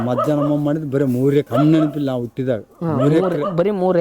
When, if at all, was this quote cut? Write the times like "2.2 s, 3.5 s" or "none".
1.5 s